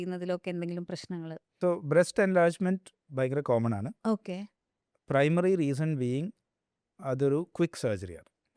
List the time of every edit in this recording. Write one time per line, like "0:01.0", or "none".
0:01.4